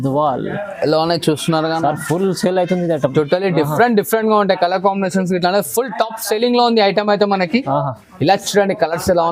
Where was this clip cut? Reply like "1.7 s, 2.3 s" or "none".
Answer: none